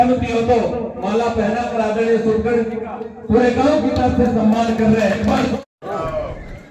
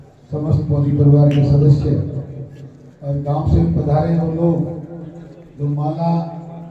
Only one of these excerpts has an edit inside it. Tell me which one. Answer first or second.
first